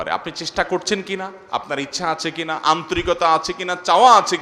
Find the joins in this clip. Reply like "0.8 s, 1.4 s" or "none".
none